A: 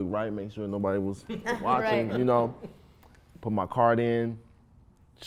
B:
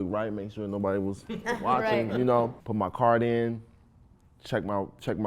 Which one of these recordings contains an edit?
B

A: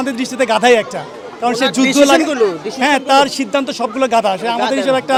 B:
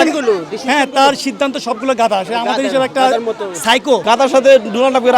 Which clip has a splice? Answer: B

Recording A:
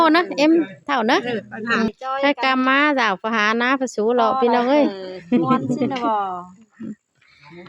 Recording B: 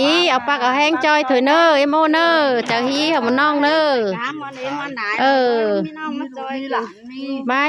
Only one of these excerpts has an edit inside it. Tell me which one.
A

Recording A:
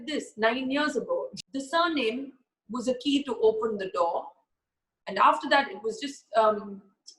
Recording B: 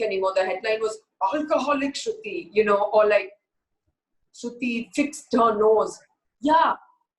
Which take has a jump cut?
A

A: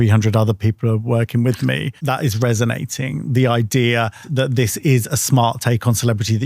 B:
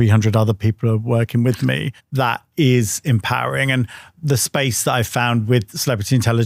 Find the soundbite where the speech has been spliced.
A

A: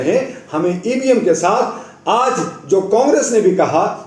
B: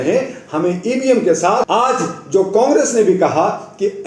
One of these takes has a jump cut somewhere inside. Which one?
B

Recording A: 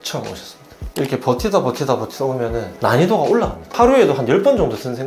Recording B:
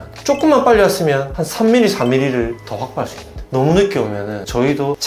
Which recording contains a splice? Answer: A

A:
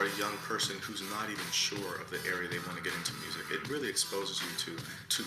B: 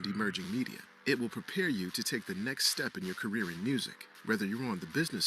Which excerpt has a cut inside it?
B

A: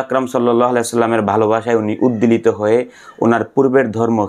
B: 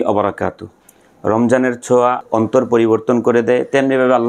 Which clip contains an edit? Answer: B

